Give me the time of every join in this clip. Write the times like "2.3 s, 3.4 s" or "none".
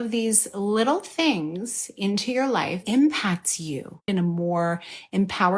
2.8 s, 4.1 s